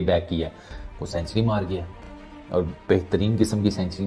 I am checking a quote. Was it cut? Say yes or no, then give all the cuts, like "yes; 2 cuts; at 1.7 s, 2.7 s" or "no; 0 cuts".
no; 0 cuts